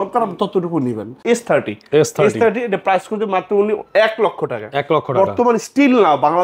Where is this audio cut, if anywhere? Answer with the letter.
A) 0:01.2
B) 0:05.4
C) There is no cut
A